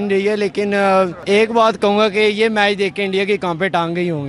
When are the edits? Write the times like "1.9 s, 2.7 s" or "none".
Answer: 1.2 s